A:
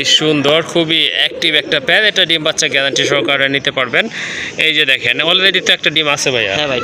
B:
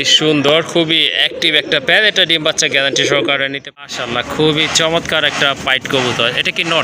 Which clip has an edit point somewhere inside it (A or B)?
B